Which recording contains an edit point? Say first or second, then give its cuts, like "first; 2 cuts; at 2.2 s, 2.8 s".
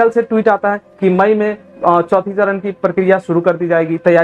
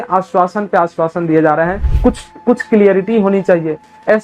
second; 1 cut; at 1.8 s